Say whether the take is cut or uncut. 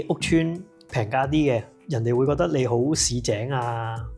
cut